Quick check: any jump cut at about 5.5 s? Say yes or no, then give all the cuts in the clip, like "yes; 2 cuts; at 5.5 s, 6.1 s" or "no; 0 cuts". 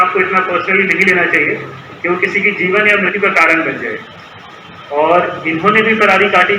no; 1 cut; at 3.2 s